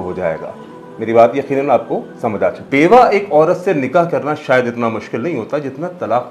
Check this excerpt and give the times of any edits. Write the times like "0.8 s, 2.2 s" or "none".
2.6 s